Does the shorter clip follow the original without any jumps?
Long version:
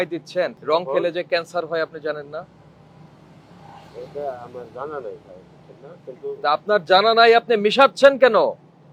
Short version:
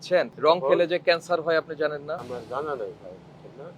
no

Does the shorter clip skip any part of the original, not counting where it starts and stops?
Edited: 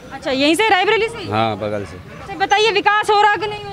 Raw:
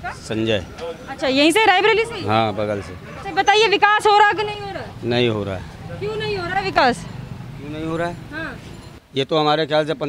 no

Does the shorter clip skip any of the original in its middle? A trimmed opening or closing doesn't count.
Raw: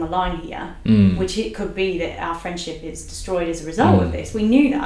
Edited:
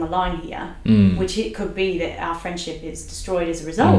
no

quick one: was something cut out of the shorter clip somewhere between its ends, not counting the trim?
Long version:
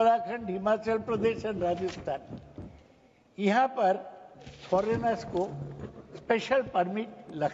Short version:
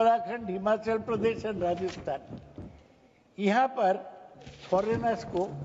no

